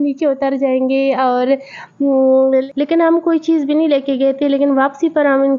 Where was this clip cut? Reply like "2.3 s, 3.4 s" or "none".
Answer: 2.7 s